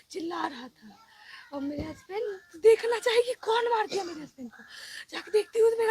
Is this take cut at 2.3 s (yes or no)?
yes